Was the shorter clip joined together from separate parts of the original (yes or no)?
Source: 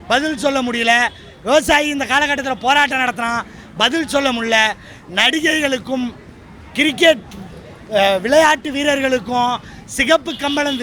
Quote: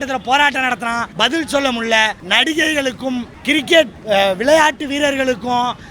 yes